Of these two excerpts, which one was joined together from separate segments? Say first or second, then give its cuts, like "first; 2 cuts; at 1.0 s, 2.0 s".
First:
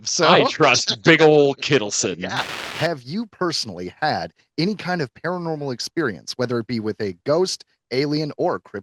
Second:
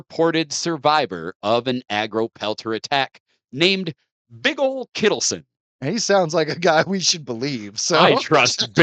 first; 1 cut; at 2.5 s